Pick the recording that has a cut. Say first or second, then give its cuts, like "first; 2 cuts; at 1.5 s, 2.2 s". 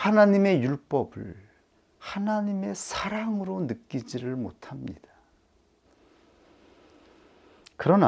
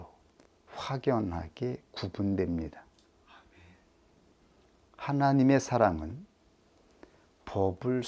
first; 1 cut; at 5.8 s